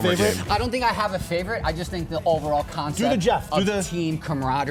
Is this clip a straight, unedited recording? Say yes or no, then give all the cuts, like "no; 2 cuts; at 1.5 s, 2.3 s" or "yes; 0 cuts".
yes; 0 cuts